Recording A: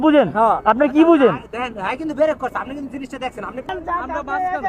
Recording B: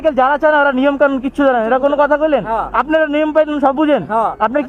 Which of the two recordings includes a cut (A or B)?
A